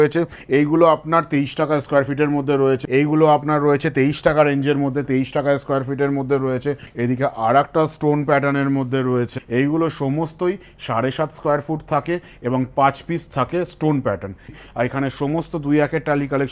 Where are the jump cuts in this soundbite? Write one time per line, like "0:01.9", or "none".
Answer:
0:02.8
0:06.9
0:09.4
0:14.6